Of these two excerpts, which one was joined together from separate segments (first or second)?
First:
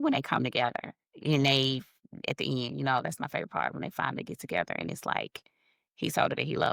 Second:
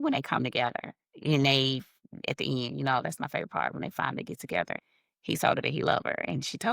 second